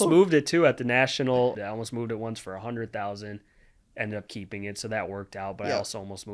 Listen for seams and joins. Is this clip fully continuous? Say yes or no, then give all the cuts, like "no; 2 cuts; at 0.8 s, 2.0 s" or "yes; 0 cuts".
no; 1 cut; at 1.6 s